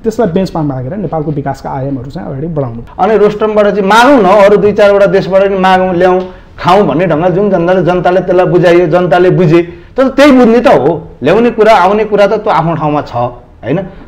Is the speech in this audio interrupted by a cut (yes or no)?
yes